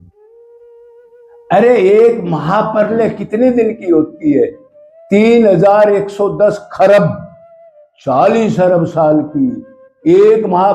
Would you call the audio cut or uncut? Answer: cut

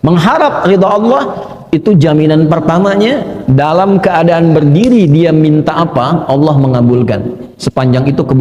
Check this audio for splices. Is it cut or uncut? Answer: uncut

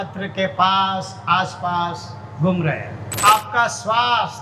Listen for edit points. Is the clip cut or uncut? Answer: cut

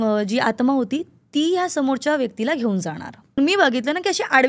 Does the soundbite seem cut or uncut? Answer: cut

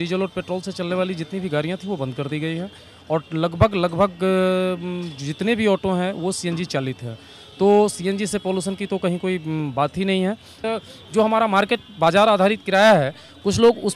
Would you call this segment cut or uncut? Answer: cut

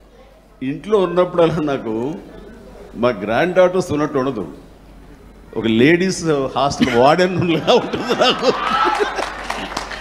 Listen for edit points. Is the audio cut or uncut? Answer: uncut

